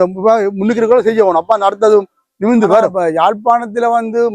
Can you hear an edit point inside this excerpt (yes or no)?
yes